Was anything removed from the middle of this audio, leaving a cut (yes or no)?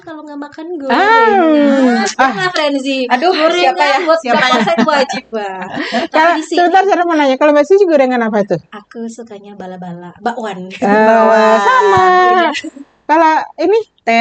no